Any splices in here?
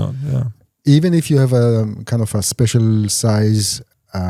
no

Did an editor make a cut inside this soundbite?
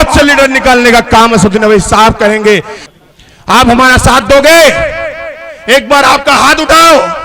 yes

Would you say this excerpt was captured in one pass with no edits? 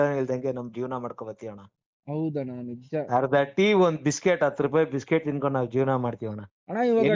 yes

